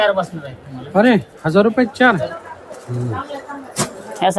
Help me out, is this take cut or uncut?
cut